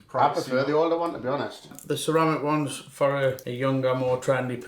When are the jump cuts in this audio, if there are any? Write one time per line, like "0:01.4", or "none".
0:01.7
0:03.5